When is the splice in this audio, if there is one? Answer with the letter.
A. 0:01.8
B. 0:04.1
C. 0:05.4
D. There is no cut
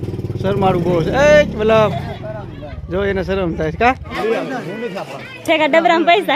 B